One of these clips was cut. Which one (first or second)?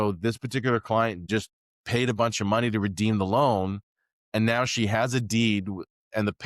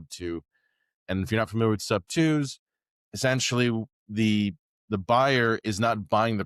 first